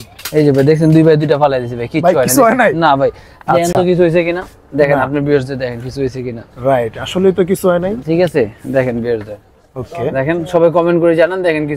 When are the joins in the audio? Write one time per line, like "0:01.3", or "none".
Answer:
none